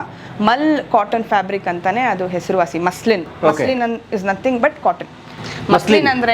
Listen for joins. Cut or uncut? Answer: uncut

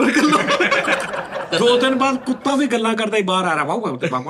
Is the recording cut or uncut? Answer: cut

